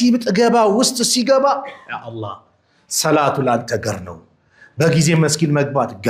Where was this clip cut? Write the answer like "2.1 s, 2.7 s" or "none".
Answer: none

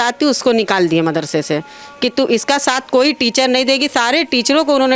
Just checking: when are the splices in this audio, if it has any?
none

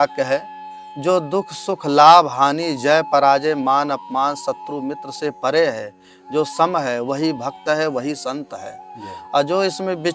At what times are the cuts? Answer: none

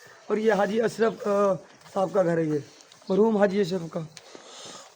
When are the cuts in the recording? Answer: none

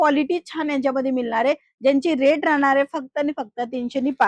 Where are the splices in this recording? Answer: none

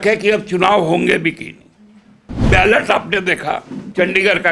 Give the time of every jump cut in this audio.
2.5 s

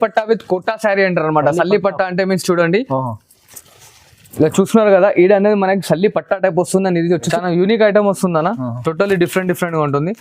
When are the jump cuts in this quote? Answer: 7.3 s

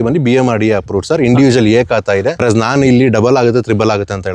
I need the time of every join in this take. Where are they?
2.4 s

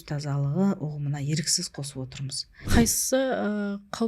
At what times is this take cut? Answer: 2.7 s

